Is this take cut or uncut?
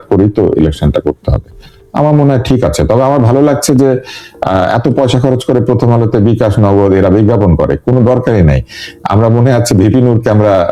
uncut